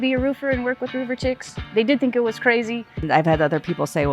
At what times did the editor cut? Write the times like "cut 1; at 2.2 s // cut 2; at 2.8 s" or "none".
cut 1; at 1.6 s // cut 2; at 3.0 s